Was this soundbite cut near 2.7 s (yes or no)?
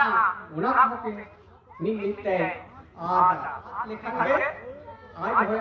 no